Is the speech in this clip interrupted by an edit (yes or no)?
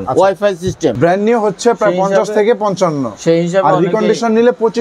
yes